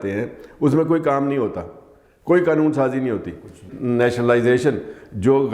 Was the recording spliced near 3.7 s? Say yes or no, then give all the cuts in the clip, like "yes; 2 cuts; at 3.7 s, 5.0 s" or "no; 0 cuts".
yes; 1 cut; at 3.7 s